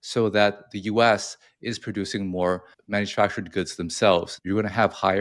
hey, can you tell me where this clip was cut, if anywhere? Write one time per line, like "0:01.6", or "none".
0:02.7
0:04.3

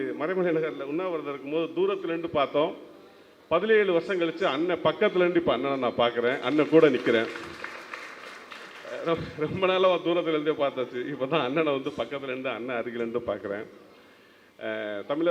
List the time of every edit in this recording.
none

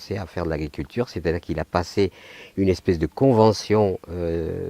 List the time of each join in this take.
0:03.1

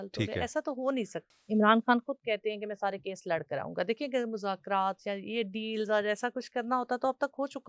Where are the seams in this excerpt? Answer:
0:01.2

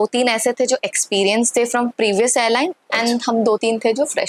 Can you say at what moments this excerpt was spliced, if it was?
none

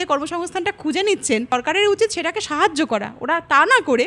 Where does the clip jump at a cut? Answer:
0:01.5

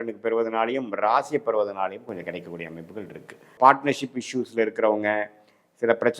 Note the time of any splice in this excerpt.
0:03.4

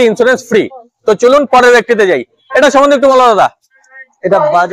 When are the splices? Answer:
none

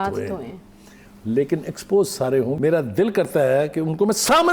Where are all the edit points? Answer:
0:02.5

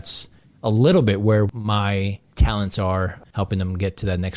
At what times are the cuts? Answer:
0:01.5
0:03.2

